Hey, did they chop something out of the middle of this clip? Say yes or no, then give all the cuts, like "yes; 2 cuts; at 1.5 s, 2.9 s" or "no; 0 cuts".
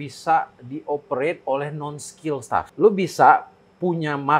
yes; 1 cut; at 2.7 s